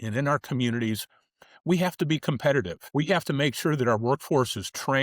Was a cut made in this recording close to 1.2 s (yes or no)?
no